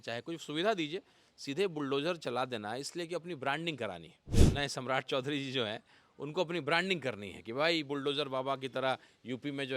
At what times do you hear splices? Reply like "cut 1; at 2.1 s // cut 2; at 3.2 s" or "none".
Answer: cut 1; at 4.2 s